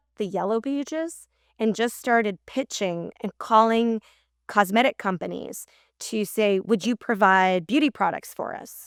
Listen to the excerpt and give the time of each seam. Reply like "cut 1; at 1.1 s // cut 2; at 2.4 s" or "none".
none